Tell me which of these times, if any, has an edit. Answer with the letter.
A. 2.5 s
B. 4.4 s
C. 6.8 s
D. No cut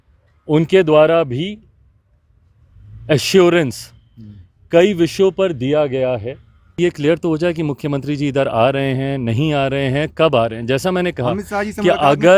C